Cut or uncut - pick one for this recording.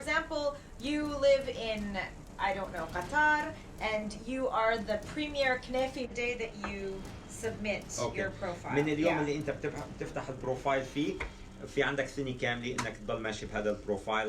cut